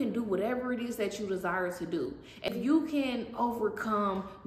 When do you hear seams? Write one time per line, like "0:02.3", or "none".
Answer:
0:02.5